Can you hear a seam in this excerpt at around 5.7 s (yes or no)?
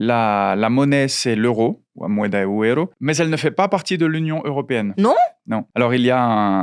yes